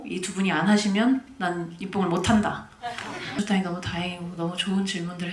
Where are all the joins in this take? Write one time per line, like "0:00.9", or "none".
0:03.3